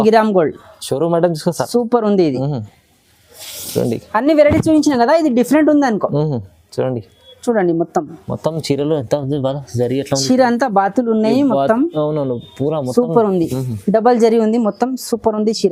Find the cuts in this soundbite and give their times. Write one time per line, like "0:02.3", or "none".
none